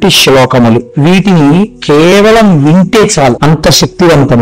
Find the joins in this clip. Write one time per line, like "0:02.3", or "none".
0:03.4